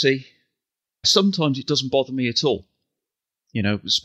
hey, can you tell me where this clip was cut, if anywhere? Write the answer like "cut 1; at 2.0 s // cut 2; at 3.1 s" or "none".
none